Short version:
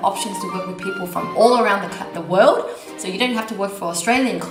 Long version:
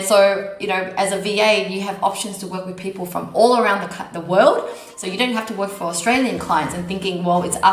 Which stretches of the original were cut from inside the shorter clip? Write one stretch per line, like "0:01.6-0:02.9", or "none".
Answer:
none